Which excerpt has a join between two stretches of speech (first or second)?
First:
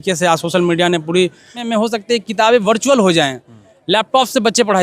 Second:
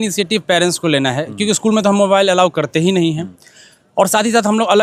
first